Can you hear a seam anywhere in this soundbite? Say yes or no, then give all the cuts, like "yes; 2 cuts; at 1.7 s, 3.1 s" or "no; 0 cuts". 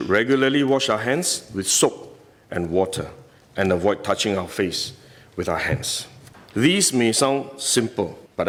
no; 0 cuts